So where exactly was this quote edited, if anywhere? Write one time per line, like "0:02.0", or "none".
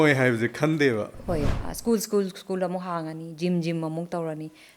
0:01.5